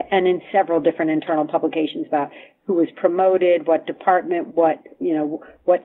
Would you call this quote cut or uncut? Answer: uncut